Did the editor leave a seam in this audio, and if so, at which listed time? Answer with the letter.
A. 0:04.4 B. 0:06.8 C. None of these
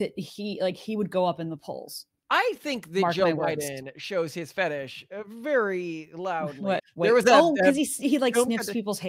B